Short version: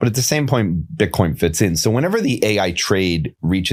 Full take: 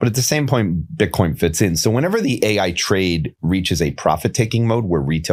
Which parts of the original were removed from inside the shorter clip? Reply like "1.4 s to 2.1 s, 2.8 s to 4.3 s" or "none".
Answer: none